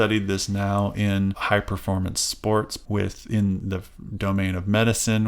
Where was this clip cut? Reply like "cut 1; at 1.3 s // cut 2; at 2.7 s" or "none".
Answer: cut 1; at 1.4 s // cut 2; at 2.8 s

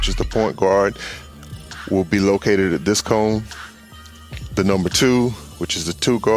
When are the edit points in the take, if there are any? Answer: none

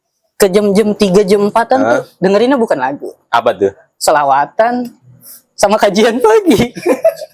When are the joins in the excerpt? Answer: none

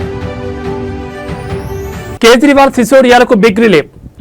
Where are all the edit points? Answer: cut 1; at 2.1 s

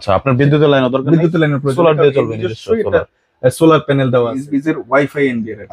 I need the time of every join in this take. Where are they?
cut 1; at 4.4 s

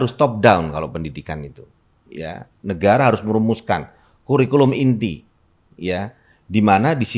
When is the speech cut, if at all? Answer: none

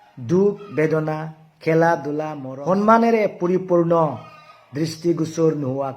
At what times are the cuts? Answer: cut 1; at 2.4 s

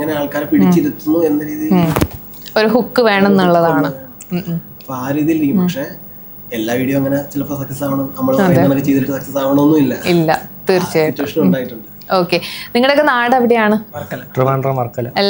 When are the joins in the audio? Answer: none

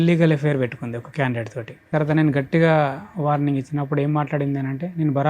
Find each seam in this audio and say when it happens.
cut 1; at 1.9 s

